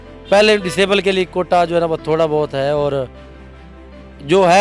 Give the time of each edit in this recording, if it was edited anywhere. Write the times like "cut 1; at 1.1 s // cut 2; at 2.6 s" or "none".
none